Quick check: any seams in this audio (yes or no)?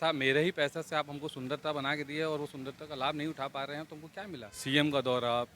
yes